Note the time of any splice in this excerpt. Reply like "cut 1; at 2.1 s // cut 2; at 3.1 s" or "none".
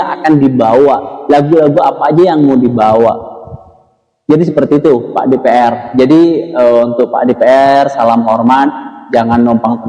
none

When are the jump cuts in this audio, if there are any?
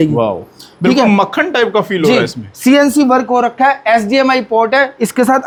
none

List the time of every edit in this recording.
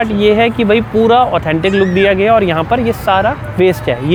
none

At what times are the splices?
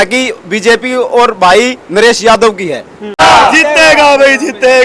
cut 1; at 3.2 s

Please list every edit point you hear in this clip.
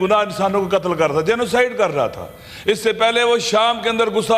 none

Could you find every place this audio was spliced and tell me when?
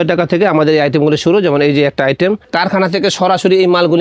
cut 1; at 2.5 s

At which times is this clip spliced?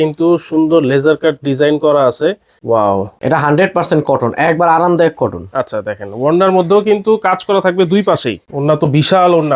cut 1; at 2.5 s // cut 2; at 3.1 s // cut 3; at 8.5 s

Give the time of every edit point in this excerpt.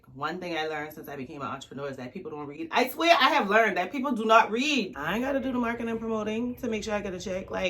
cut 1; at 4.9 s

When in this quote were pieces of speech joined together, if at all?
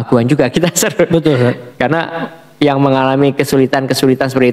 none

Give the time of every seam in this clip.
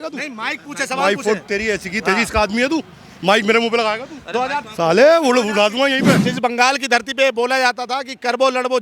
cut 1; at 6.2 s

